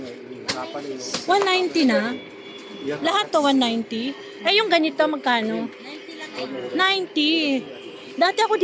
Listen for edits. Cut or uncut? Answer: uncut